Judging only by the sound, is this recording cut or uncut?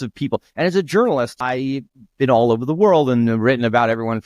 cut